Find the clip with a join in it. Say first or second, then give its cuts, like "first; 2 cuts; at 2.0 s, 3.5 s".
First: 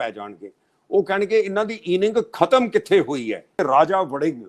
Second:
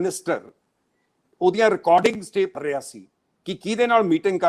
first; 1 cut; at 3.6 s